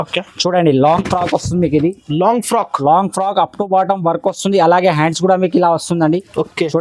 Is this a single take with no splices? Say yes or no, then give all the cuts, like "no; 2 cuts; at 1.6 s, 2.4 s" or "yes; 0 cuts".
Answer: yes; 0 cuts